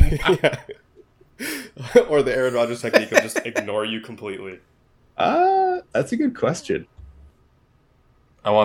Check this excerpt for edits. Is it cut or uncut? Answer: cut